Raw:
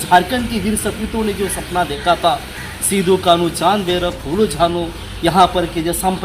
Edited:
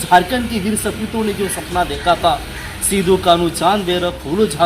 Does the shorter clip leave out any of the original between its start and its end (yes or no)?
no